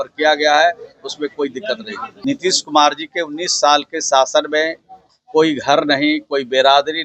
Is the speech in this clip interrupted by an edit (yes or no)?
yes